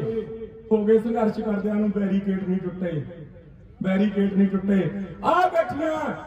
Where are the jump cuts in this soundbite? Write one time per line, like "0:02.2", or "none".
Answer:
none